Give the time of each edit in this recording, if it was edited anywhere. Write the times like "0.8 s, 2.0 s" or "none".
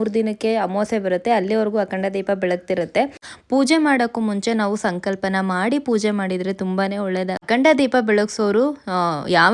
3.3 s, 7.4 s